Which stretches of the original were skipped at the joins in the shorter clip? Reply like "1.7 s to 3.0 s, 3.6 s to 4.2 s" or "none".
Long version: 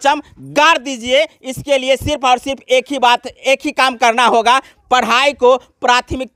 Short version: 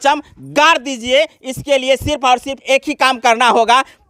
2.5 s to 3.3 s